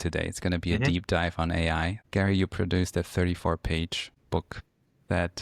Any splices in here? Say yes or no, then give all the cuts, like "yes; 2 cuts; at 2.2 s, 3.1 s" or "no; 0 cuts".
yes; 2 cuts; at 2.0 s, 4.5 s